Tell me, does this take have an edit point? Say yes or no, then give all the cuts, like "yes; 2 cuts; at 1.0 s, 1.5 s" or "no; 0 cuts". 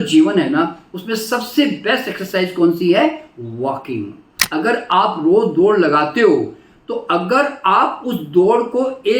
yes; 1 cut; at 4.4 s